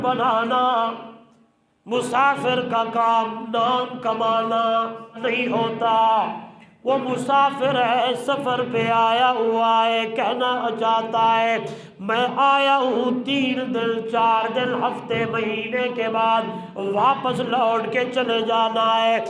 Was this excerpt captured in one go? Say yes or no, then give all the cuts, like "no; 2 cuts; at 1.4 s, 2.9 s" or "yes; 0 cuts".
no; 1 cut; at 5.2 s